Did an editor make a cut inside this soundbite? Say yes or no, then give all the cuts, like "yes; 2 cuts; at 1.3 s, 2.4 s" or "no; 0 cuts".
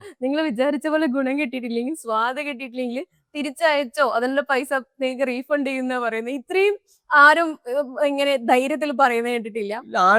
no; 0 cuts